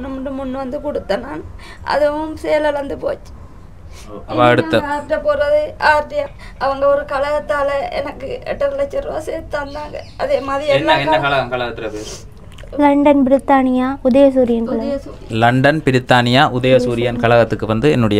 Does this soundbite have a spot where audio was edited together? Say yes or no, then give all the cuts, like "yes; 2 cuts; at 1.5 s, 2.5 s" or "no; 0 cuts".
yes; 1 cut; at 6.3 s